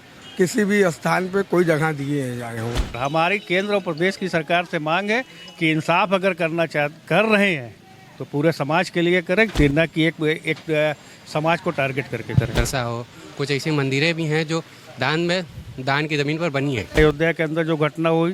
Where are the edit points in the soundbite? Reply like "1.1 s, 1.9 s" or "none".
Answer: 3.0 s, 12.5 s, 17.0 s